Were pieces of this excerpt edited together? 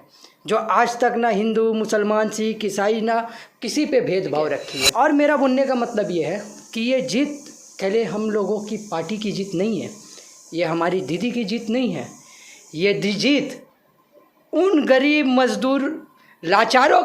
yes; 1 cut; at 4.8 s

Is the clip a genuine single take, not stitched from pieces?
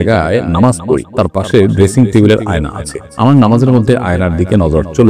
yes; 0 cuts

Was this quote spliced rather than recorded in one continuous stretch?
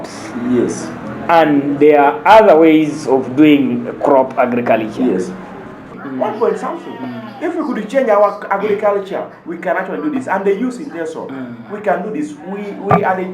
yes; 1 cut; at 5.9 s

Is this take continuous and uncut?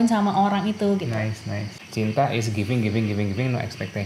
no; 1 cut; at 1.8 s

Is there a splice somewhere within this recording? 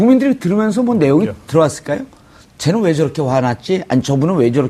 no; 0 cuts

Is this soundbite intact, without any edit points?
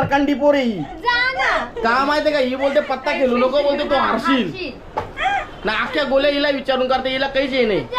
yes; 0 cuts

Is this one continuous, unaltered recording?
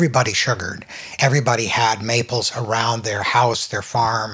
no; 1 cut; at 1.0 s

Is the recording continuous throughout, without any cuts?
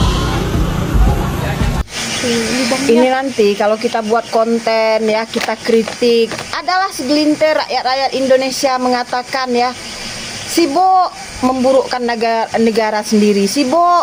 yes; 0 cuts

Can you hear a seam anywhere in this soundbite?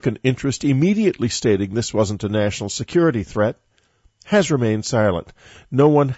yes; 1 cut; at 3.0 s

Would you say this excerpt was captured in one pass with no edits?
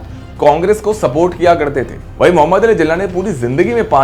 no; 1 cut; at 2.0 s

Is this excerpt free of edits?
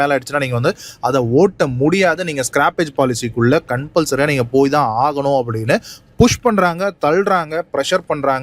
yes; 0 cuts

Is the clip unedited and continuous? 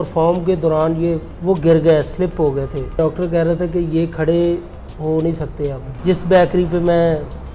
no; 3 cuts; at 1.3 s, 3.0 s, 5.9 s

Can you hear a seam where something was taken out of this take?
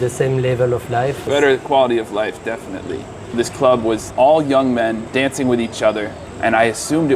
yes; 5 cuts; at 1.3 s, 3.3 s, 4.1 s, 5.0 s, 6.2 s

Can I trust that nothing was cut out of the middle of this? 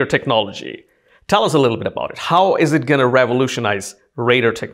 yes; 0 cuts

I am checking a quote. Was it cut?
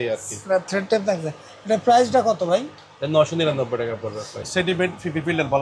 yes; 1 cut; at 4.4 s

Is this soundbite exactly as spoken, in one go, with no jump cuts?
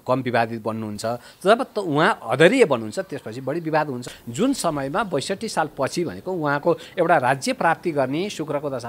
no; 1 cut; at 4.1 s

